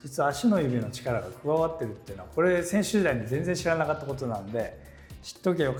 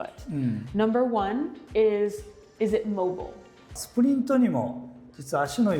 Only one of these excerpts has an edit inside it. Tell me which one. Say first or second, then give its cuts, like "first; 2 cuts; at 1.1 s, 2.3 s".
second; 1 cut; at 3.8 s